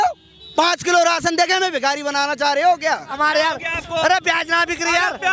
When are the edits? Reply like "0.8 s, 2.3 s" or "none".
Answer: 3.2 s